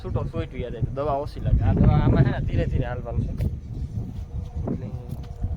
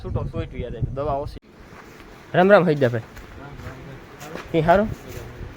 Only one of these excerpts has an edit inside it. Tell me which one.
second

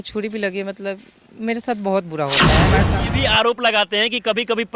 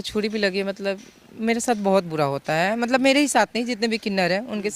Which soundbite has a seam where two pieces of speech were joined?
first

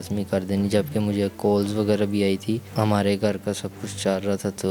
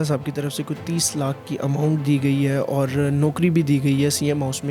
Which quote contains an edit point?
first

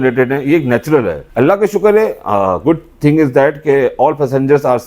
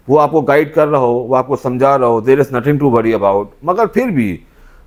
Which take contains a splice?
first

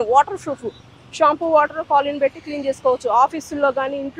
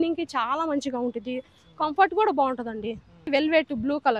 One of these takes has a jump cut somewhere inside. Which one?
second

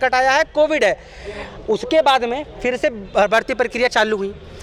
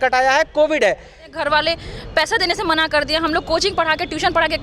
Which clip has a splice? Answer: second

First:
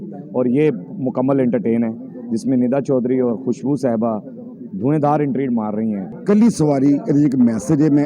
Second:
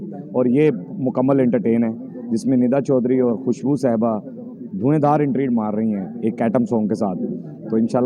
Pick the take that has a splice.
first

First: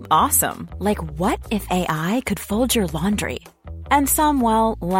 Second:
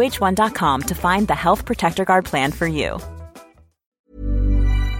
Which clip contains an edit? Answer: second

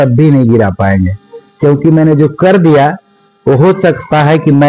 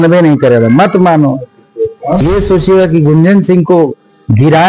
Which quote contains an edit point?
second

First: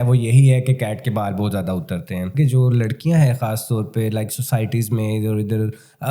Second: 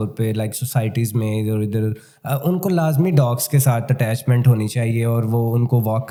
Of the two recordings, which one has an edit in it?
first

